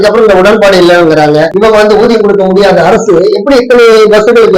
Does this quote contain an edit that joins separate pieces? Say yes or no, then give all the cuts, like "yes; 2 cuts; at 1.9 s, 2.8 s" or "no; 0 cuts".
yes; 1 cut; at 1.5 s